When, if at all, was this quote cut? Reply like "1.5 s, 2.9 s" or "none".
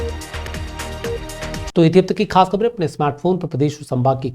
none